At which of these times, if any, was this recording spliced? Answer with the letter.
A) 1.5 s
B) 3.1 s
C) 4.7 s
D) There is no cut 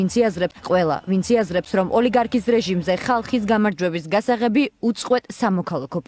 A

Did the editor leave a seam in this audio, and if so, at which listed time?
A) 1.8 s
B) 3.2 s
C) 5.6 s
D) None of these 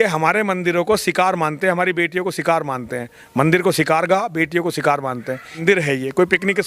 C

